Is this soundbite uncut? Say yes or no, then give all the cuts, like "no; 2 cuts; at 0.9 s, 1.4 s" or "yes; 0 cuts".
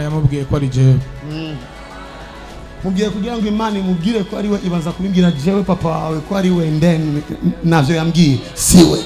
no; 1 cut; at 2.7 s